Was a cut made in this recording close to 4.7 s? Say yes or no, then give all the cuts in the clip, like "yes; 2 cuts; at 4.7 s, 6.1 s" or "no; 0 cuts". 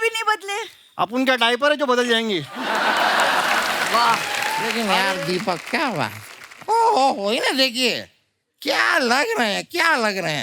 yes; 1 cut; at 4.7 s